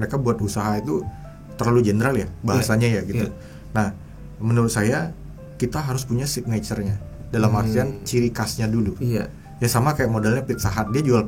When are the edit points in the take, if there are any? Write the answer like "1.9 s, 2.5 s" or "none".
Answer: none